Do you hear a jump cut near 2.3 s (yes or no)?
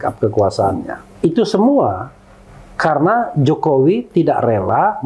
no